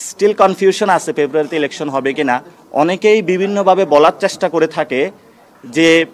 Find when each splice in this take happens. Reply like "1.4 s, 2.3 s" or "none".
2.6 s